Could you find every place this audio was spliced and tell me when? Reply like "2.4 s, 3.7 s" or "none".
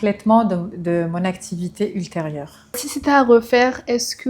2.9 s